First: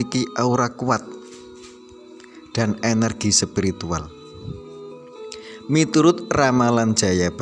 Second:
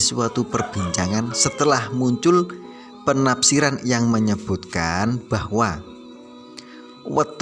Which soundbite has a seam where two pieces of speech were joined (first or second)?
first